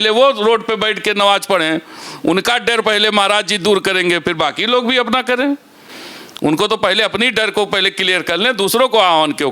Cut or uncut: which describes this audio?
uncut